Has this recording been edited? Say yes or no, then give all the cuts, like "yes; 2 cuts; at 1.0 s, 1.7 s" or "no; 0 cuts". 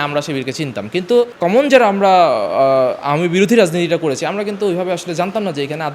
yes; 1 cut; at 1.3 s